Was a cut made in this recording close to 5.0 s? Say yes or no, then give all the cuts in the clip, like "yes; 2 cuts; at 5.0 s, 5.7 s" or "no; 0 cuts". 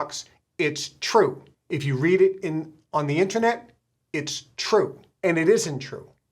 yes; 2 cuts; at 1.5 s, 5.0 s